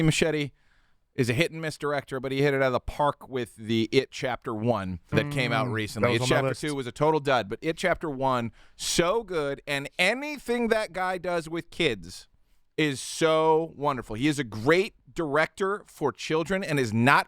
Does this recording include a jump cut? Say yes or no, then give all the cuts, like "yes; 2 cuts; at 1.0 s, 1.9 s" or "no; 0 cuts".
yes; 2 cuts; at 5.1 s, 15.0 s